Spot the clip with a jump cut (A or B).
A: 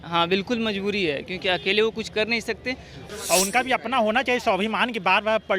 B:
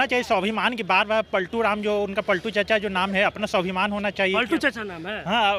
A